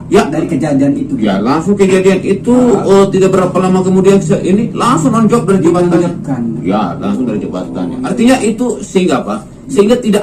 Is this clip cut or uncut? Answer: uncut